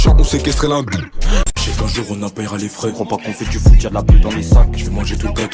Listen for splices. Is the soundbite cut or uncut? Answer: cut